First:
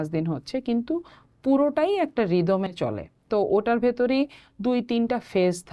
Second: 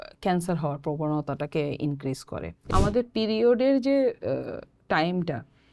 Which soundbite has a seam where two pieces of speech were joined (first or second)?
second